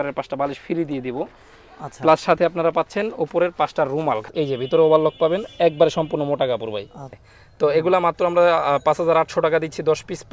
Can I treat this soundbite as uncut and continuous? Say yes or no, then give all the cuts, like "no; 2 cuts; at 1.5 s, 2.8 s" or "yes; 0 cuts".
no; 2 cuts; at 4.3 s, 7.2 s